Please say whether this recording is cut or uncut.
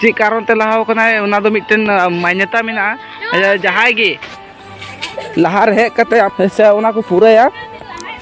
cut